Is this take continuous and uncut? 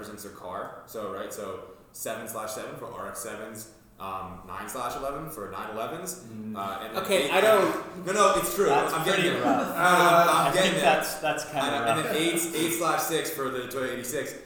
yes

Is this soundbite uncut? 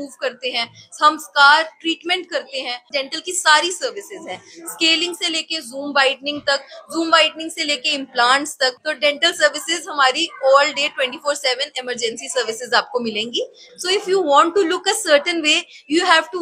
no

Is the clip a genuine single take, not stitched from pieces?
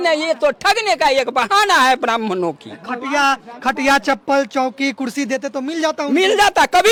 yes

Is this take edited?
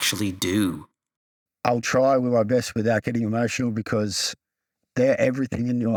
no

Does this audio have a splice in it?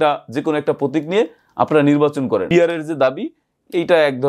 yes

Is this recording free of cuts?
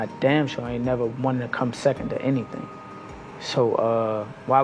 yes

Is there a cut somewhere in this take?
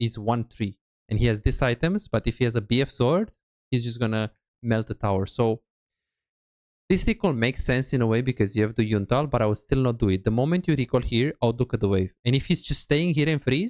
no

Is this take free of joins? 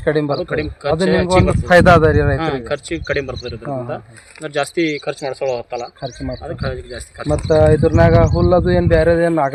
yes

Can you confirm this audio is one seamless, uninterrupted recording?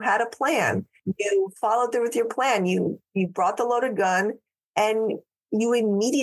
no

